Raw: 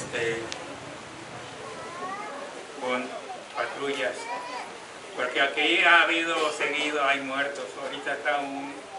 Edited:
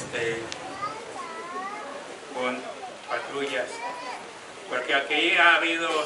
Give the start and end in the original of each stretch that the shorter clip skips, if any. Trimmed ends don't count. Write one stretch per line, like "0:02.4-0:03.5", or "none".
0:01.1-0:01.5